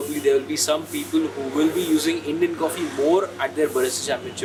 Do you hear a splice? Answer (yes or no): no